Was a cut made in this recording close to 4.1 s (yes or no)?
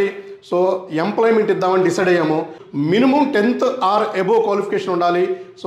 no